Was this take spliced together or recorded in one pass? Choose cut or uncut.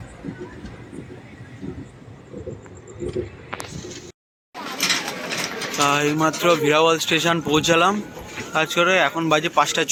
uncut